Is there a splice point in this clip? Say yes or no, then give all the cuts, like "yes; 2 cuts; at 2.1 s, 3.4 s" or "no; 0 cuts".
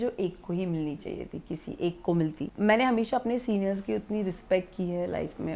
yes; 1 cut; at 2.5 s